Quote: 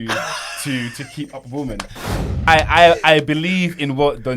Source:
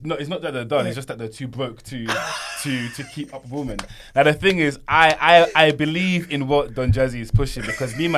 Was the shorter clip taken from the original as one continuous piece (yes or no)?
no